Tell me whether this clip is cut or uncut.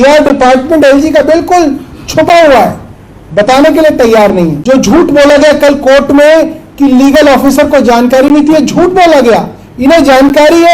cut